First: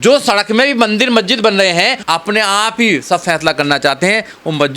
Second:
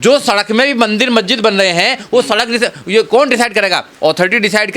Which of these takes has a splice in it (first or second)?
first